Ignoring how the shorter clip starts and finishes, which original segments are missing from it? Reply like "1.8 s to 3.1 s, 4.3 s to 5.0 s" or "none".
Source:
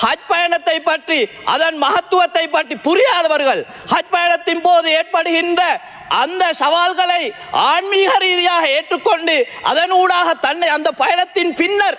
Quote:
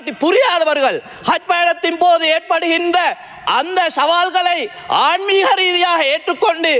none